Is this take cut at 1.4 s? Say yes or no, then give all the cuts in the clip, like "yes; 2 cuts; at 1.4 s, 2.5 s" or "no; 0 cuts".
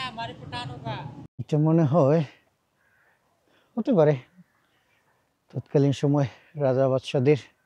yes; 1 cut; at 1.4 s